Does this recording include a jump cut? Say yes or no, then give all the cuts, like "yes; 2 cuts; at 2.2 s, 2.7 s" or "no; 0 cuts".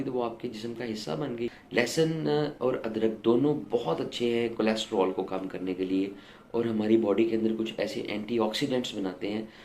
yes; 1 cut; at 1.6 s